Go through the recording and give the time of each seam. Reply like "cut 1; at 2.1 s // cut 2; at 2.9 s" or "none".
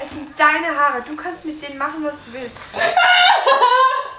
cut 1; at 2.8 s